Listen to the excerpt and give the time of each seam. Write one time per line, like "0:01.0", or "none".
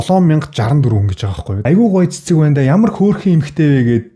0:01.5